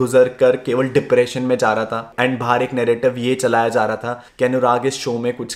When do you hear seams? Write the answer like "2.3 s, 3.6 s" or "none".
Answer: none

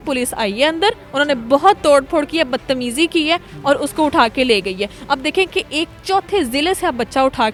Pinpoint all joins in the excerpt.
none

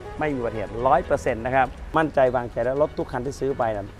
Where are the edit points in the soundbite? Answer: 1.8 s

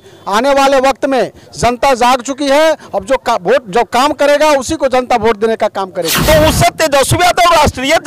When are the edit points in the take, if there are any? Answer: 6.1 s

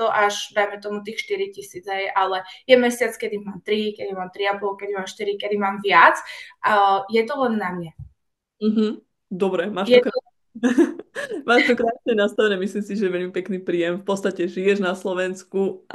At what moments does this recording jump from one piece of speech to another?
none

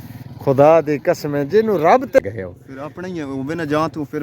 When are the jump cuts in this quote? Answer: 2.2 s

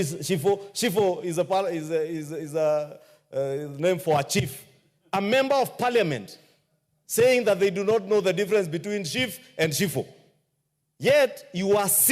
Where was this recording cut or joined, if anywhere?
none

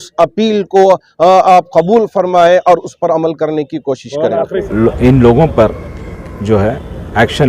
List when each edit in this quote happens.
4.6 s

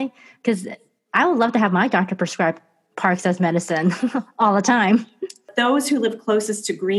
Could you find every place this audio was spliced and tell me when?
5.5 s

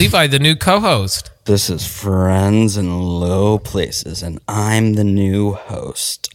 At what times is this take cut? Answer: 1.3 s

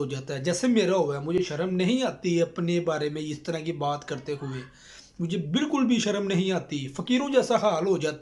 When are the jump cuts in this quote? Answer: none

